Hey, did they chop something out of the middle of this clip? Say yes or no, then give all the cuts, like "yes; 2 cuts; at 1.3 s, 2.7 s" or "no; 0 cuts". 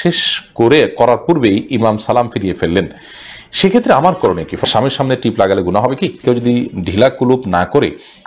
yes; 2 cuts; at 4.6 s, 6.2 s